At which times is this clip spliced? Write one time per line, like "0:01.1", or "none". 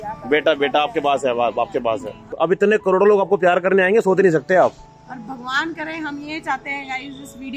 0:02.3